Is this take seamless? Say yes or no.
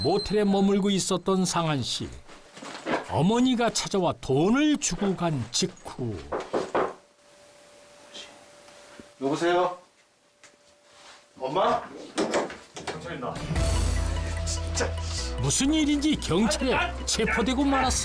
yes